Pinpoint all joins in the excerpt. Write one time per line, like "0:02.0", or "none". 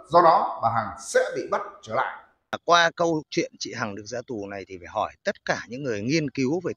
0:02.6